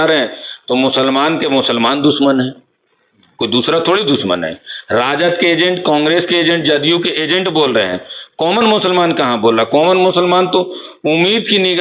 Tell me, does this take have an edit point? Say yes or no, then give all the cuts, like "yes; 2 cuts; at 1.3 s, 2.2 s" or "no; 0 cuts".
no; 0 cuts